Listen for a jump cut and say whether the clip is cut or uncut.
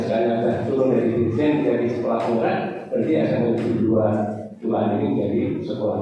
uncut